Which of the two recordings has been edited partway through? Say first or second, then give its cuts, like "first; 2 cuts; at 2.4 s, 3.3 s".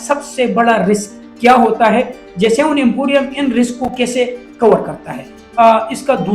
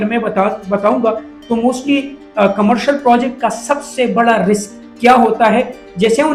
first; 1 cut; at 5.4 s